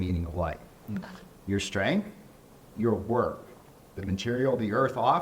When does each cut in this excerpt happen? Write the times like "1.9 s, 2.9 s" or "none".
none